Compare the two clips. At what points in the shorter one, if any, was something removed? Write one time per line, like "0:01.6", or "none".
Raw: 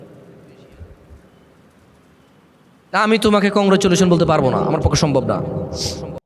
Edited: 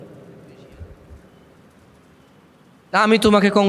none